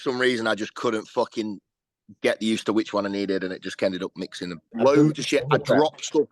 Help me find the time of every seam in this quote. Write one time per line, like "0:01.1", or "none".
0:04.6

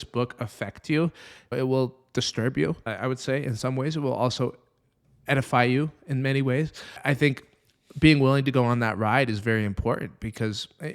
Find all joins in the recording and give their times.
0:01.5
0:02.9
0:07.0

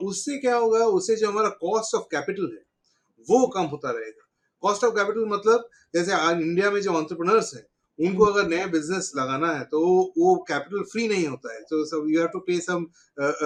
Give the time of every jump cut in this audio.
none

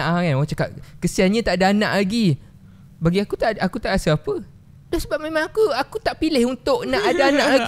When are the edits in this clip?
none

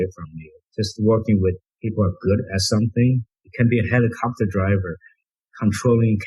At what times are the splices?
0:01.7

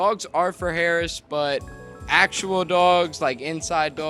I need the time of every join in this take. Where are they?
none

